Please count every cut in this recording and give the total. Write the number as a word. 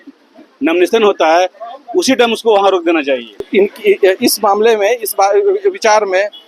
one